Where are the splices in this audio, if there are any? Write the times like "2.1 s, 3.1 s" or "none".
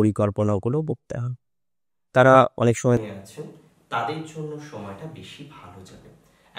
3.0 s